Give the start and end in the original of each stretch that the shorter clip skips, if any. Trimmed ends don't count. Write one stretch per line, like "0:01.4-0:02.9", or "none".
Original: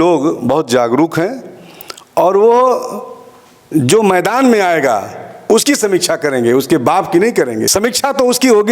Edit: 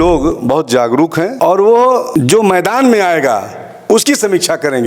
0:01.3-0:02.1
0:02.8-0:03.7